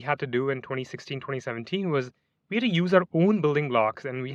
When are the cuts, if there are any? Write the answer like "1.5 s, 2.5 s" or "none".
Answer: none